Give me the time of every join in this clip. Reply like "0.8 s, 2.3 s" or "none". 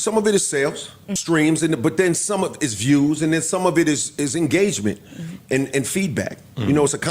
1.1 s

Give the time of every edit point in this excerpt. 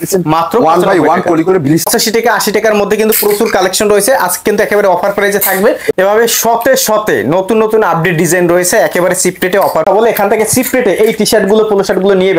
1.9 s, 5.9 s, 9.8 s

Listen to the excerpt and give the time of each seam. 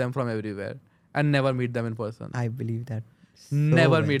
none

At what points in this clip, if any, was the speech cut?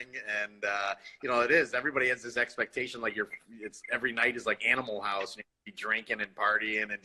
none

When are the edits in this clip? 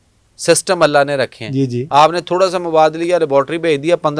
1.8 s

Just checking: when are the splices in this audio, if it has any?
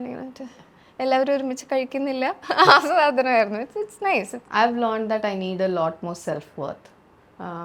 4.4 s

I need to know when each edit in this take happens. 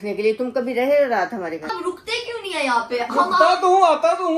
none

